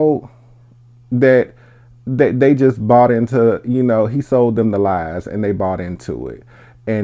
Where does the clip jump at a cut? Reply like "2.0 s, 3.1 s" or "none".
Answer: none

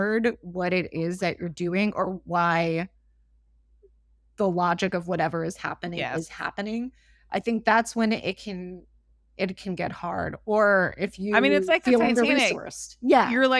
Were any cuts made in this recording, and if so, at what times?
none

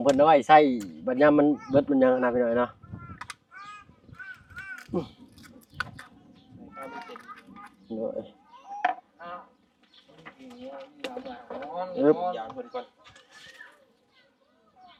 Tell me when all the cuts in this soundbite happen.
none

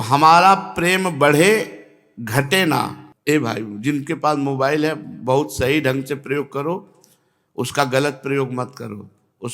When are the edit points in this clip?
3.1 s

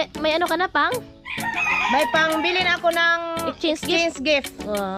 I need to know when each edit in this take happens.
none

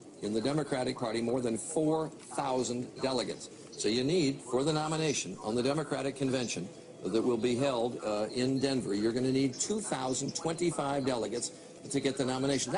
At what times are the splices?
9.6 s

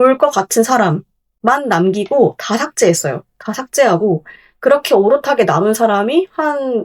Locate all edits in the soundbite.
none

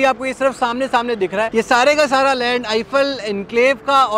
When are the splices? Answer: 1.5 s

